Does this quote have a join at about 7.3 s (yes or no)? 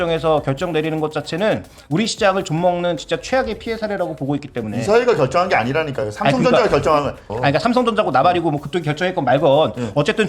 yes